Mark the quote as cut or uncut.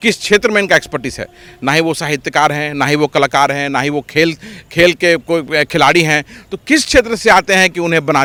uncut